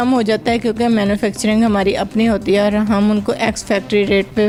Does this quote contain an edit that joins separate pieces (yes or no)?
no